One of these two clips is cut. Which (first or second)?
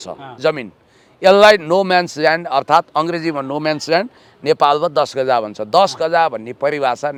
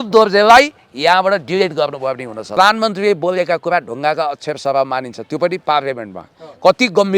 second